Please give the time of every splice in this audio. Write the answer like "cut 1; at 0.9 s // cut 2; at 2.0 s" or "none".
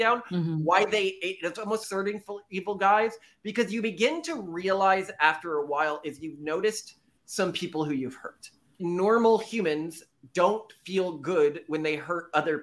cut 1; at 8.8 s